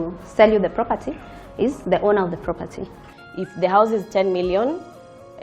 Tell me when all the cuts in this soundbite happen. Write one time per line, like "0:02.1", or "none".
0:03.0